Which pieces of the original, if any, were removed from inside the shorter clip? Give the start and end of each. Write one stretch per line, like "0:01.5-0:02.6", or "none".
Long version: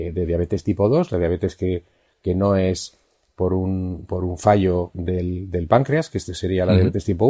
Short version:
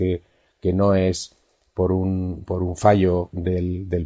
none